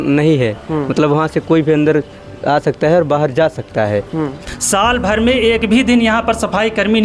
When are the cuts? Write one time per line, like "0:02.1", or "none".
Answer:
0:04.5

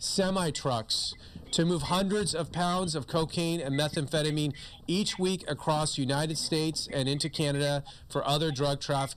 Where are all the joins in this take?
none

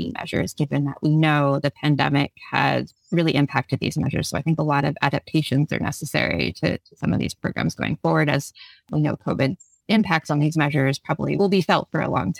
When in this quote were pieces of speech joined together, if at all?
0:08.8
0:11.4

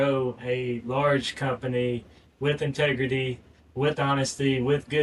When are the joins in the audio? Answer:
none

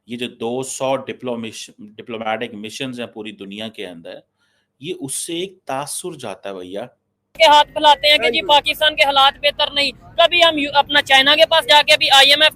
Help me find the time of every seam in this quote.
0:07.4

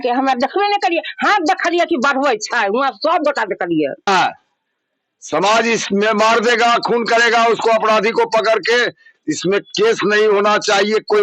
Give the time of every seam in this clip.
0:04.1

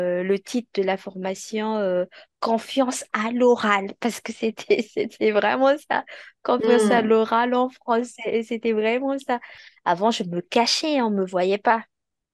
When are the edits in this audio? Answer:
0:09.6

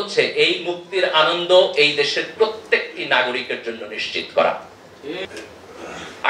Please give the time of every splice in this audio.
0:05.3

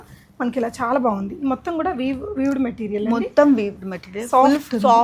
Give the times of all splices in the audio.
none

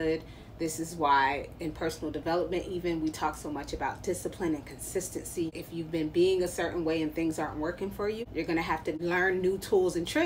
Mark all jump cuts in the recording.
0:05.6
0:08.2
0:09.0

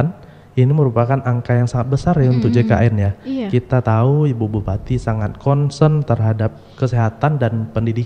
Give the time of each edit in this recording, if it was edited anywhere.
none

